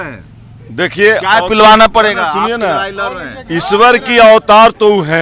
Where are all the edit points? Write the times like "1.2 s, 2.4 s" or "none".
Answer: none